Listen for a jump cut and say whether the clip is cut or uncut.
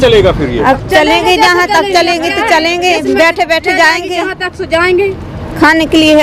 uncut